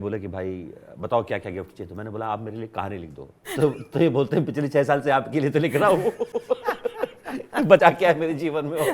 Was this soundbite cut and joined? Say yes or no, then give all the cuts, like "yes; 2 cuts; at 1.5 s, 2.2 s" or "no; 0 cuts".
no; 0 cuts